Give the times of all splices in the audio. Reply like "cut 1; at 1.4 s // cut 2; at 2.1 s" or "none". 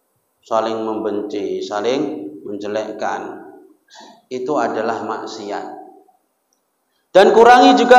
none